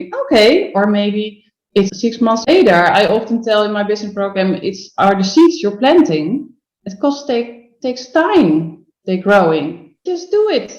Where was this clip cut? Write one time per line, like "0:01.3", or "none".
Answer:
0:09.9